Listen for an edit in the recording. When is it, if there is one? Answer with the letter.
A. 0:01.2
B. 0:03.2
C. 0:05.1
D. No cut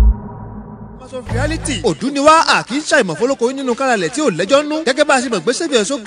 A